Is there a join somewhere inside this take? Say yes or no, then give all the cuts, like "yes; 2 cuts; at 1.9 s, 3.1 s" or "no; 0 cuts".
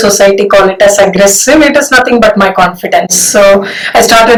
no; 0 cuts